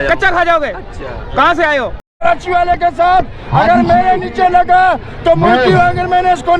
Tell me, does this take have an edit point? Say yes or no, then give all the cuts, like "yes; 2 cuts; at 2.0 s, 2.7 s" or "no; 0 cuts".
yes; 1 cut; at 2.0 s